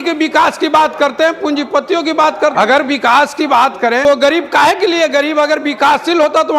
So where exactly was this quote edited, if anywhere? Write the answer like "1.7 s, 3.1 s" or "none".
2.5 s, 4.0 s